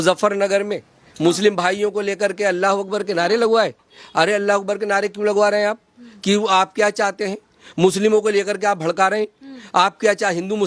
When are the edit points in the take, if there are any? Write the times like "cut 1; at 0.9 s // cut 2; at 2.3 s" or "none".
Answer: none